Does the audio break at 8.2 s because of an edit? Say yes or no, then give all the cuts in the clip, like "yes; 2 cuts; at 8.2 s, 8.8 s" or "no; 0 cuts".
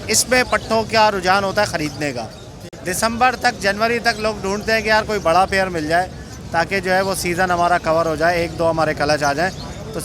no; 0 cuts